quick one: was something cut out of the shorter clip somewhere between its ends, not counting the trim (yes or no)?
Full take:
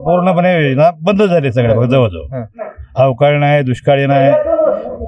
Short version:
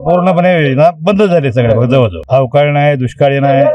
yes